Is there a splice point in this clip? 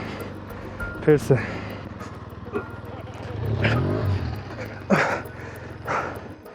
yes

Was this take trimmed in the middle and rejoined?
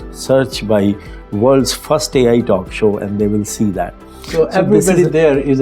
no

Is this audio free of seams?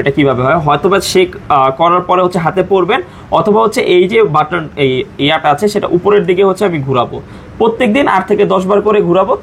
yes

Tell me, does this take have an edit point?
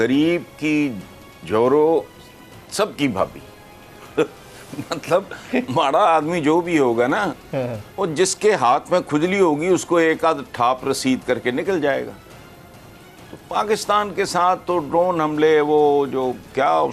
no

